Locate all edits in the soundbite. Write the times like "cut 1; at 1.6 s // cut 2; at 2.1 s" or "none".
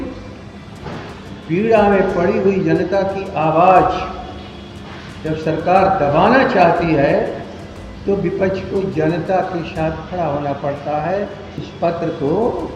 cut 1; at 11.7 s